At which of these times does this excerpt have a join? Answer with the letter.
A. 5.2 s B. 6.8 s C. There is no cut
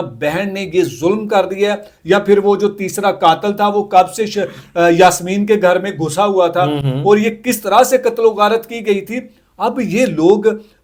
C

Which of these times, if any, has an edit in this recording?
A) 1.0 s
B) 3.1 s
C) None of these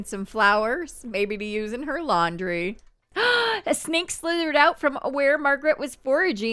B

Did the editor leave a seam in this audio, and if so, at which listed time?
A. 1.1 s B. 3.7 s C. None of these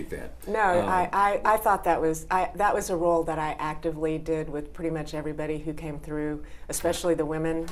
C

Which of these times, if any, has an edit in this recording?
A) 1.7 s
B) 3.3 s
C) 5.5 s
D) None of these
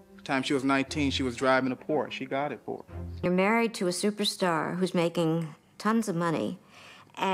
B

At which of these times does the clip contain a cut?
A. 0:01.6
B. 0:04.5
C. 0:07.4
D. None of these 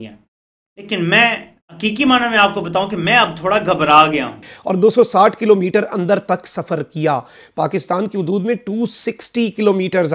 B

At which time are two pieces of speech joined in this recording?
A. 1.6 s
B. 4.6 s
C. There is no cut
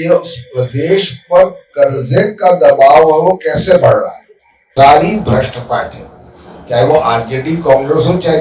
B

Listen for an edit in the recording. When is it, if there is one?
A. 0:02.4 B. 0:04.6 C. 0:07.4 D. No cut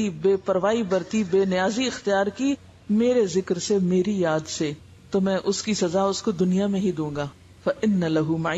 C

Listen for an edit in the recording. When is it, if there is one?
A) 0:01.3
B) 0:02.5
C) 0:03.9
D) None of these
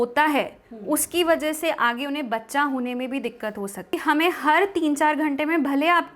C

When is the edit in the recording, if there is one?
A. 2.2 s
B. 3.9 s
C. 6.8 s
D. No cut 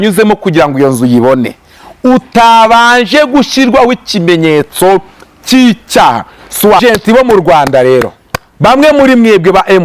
C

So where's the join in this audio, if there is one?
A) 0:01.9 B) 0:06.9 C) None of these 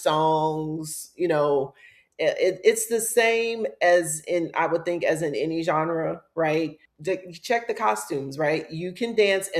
B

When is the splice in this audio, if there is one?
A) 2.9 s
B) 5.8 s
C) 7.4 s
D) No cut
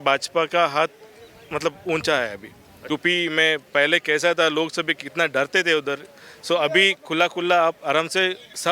A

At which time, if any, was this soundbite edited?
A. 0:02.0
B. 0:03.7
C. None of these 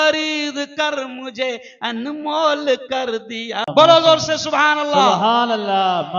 B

